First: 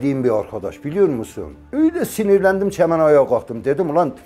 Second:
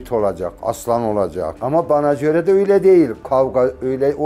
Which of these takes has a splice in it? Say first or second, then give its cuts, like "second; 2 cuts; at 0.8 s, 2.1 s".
second; 1 cut; at 1.6 s